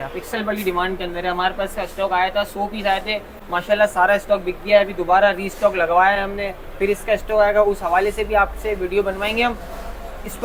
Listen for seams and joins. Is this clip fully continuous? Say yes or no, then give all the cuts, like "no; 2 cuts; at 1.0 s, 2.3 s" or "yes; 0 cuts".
yes; 0 cuts